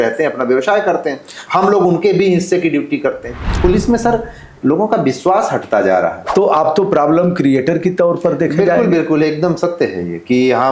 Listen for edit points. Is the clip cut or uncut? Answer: cut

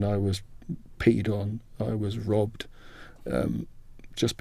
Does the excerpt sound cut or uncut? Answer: uncut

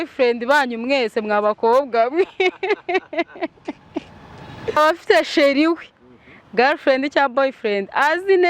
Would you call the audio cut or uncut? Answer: cut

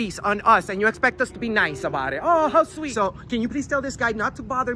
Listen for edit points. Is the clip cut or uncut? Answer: cut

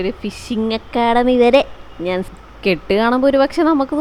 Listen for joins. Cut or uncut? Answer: cut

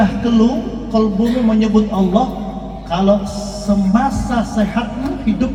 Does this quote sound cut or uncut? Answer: uncut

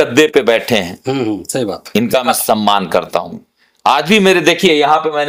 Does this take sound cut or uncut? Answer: uncut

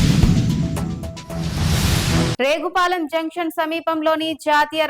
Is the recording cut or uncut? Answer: cut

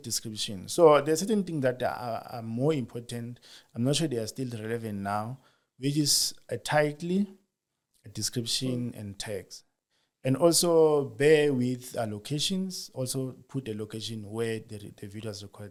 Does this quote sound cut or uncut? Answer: uncut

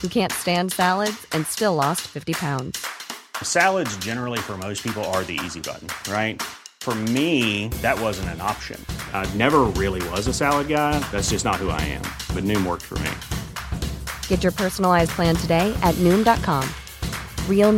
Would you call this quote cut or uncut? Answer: uncut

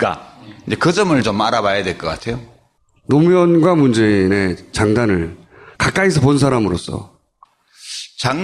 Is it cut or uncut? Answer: uncut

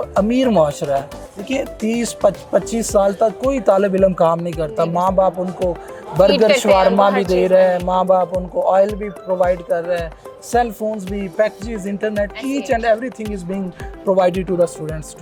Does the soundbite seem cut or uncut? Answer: uncut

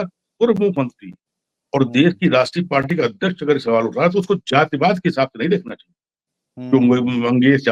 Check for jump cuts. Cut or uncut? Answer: uncut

